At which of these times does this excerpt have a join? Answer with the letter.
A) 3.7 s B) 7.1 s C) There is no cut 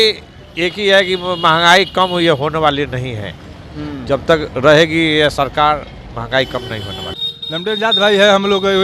B